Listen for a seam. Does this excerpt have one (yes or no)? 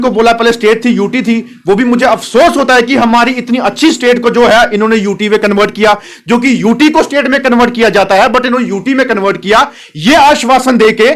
no